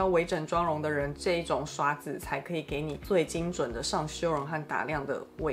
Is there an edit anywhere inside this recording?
no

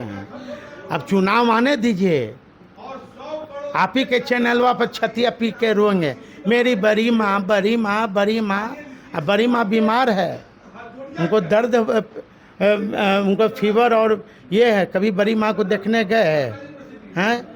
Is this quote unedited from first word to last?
yes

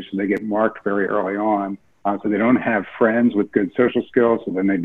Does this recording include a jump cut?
yes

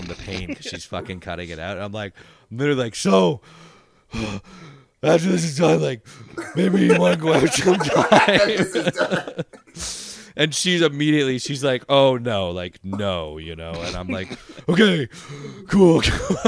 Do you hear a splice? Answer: no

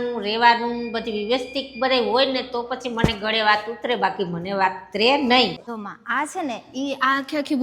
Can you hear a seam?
yes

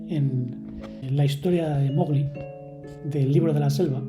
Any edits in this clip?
no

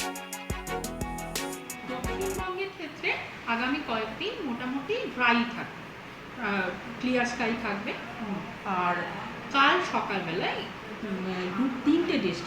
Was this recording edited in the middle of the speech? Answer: yes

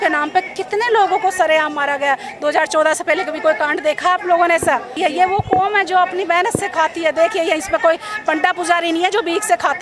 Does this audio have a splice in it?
yes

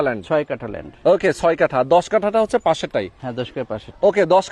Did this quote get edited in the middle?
no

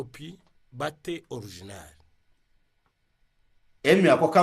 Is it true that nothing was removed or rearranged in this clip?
yes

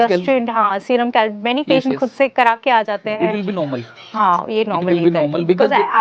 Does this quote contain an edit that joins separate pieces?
no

